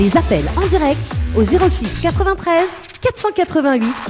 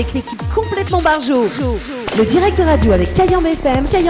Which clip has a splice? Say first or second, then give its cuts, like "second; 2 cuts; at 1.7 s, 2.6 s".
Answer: second; 1 cut; at 2.0 s